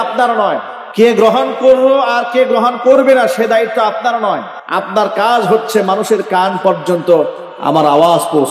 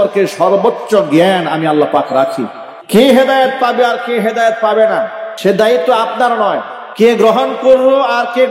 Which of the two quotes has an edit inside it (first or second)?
first